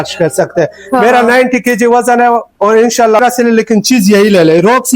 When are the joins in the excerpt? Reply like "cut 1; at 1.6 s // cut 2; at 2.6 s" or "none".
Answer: cut 1; at 3.2 s